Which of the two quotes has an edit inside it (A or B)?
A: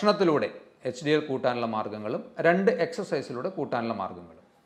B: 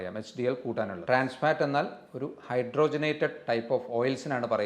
B